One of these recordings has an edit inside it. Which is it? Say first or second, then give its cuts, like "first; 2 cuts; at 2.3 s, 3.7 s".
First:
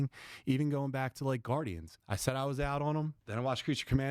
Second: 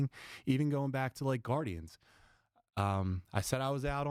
first; 2 cuts; at 2.0 s, 3.2 s